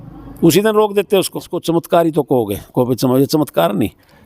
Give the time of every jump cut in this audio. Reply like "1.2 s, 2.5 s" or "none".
1.6 s